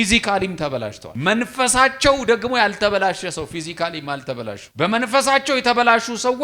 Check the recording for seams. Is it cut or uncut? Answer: cut